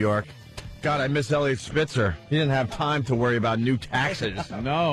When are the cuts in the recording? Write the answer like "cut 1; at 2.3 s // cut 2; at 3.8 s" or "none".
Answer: cut 1; at 3.5 s